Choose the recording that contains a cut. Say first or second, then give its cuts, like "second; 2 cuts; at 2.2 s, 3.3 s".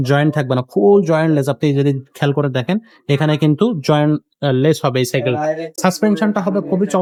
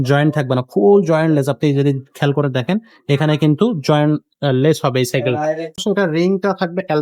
second; 1 cut; at 5.8 s